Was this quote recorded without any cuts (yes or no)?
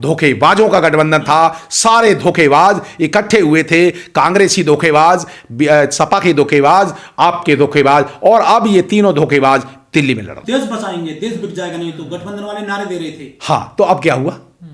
yes